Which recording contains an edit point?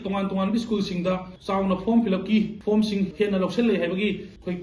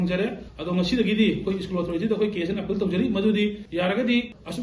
first; 2 cuts; at 1.3 s, 2.9 s

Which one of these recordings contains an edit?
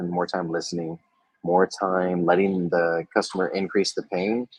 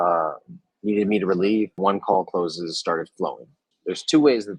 second; 2 cuts; at 1.8 s, 3.7 s

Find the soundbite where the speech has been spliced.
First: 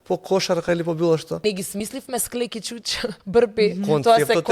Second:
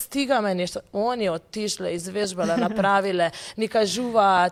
first; 2 cuts; at 1.4 s, 3.2 s

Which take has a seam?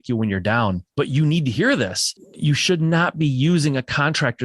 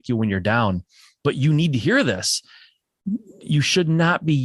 first; 2 cuts; at 0.8 s, 2.3 s

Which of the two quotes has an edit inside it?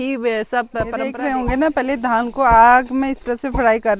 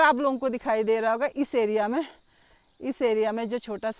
first; 1 cut; at 1.0 s

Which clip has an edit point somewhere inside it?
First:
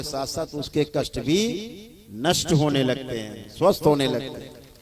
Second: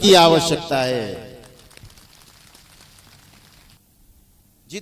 second; 1 cut; at 3.8 s

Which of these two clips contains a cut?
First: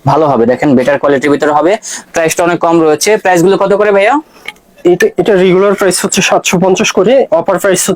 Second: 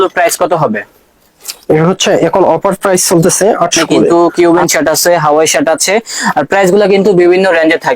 second; 1 cut; at 4.1 s

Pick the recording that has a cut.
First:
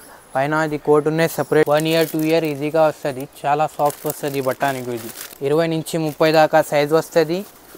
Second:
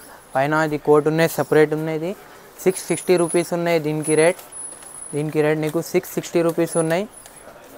first; 2 cuts; at 1.6 s, 5.2 s

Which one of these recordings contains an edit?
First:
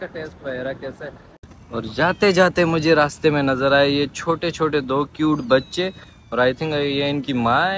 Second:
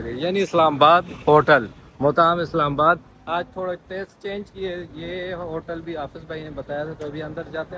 first; 1 cut; at 1.5 s

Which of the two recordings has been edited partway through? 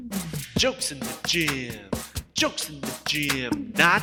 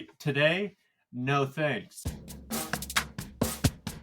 second; 1 cut; at 1.9 s

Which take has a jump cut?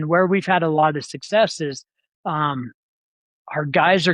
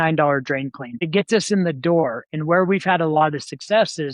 second; 1 cut; at 1.1 s

